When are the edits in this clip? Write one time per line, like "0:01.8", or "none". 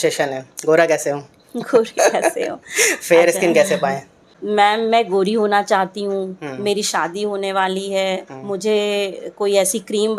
0:04.4